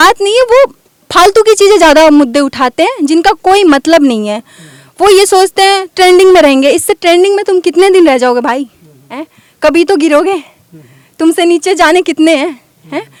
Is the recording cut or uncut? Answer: uncut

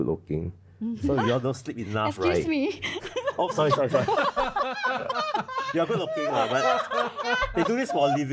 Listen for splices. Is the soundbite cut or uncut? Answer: uncut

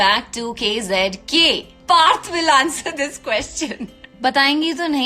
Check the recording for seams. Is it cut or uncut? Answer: cut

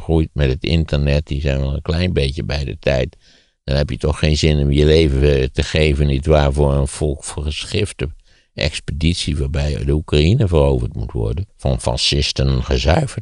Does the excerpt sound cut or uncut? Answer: cut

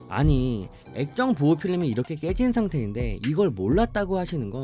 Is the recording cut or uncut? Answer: uncut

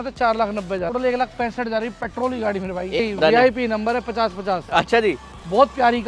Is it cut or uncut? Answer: cut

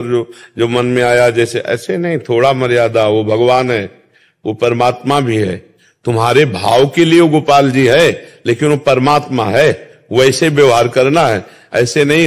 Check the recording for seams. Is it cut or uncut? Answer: uncut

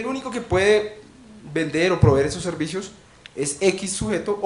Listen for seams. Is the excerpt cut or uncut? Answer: uncut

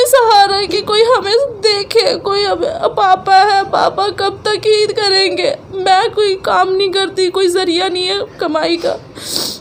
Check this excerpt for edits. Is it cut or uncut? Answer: uncut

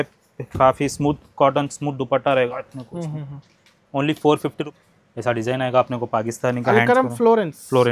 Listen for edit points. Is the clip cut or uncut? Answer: cut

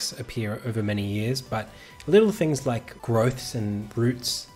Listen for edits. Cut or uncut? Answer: cut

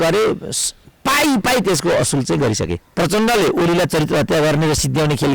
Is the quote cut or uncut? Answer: cut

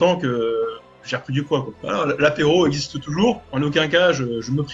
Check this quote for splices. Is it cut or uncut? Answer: cut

